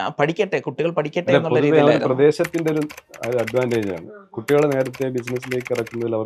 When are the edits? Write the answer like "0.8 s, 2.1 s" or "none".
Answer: none